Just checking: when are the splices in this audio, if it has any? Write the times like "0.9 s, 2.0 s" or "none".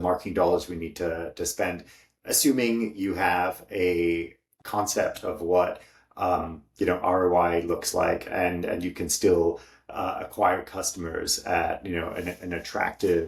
none